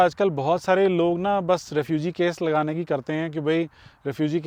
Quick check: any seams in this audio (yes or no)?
no